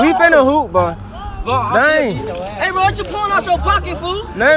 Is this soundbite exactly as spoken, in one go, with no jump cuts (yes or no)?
yes